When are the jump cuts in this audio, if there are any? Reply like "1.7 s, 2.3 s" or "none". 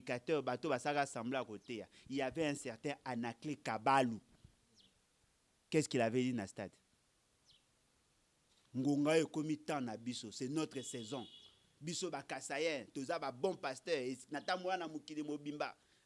none